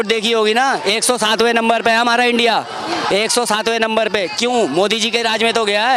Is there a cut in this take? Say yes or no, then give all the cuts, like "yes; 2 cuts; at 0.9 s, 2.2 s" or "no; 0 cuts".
no; 0 cuts